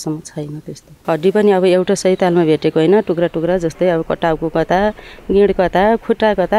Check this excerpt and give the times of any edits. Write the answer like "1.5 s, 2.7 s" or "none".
0.9 s

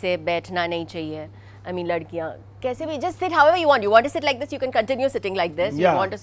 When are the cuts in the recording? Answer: none

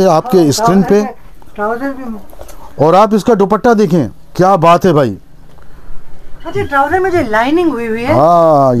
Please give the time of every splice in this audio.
none

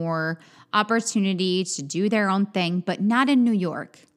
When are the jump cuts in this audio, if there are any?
none

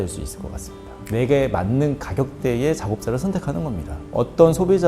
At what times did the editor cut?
1.0 s

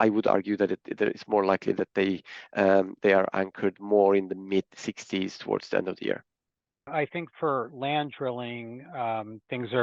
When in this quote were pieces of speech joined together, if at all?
6.9 s

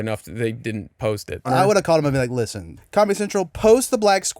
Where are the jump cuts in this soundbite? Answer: 1.5 s, 2.8 s

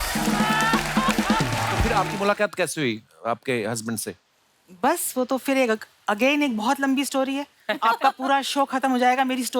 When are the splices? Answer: 1.9 s

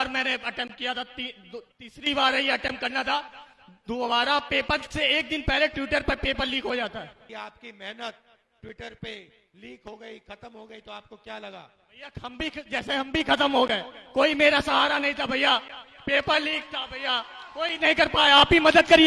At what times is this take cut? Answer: 7.2 s

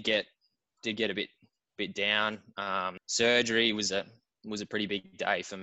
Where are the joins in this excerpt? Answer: 3.0 s

